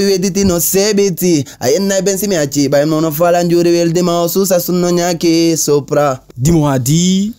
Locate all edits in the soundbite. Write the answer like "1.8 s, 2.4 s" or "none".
6.3 s